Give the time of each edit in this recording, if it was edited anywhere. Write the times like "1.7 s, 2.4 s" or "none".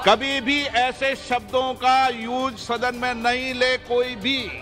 none